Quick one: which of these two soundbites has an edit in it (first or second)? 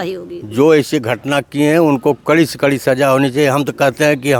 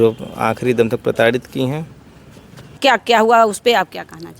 second